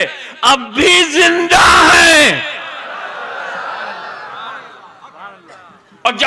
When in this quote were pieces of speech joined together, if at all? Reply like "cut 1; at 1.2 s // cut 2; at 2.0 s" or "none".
none